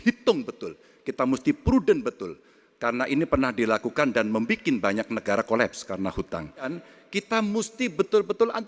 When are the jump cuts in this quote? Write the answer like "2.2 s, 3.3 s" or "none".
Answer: 6.8 s